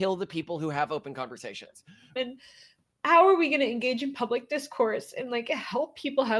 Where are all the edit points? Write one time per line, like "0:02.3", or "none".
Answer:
0:02.1